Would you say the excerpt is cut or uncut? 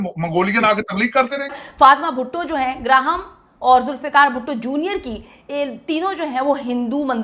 cut